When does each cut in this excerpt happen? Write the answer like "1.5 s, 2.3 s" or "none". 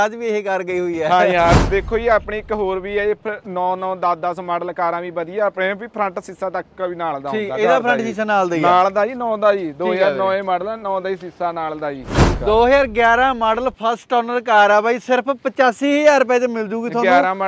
1.6 s, 12.2 s